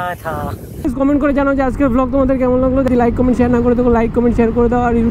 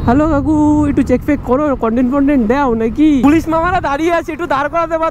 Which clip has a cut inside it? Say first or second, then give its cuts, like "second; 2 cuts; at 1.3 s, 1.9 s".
first; 1 cut; at 2.9 s